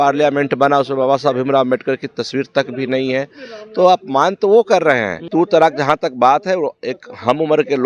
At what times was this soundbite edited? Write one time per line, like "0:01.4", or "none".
0:05.3